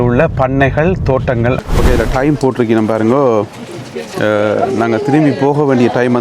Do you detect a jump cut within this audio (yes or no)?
yes